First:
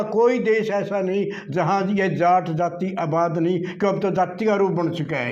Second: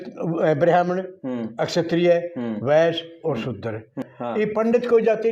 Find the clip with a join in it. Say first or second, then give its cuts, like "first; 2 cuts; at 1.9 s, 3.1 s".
second; 1 cut; at 4.1 s